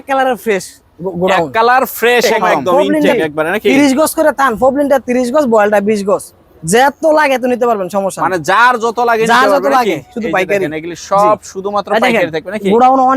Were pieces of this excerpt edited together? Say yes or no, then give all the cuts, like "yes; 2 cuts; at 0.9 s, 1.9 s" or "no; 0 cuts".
yes; 1 cut; at 3.1 s